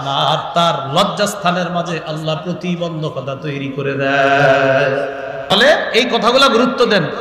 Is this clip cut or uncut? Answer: cut